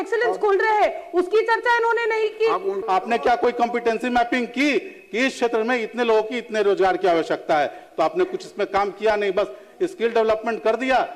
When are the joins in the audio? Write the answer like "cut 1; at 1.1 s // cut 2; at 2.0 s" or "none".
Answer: cut 1; at 2.8 s